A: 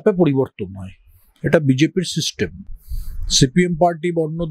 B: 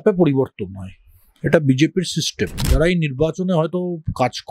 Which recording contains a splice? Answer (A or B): B